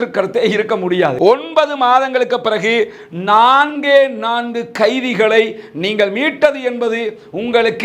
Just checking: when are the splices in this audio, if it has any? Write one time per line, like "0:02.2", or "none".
0:01.1